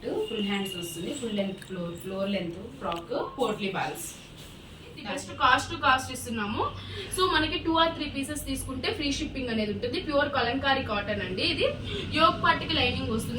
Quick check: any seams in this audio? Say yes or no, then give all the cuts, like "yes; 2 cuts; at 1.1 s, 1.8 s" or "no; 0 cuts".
yes; 1 cut; at 5.1 s